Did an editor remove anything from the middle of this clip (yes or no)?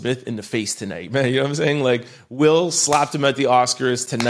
no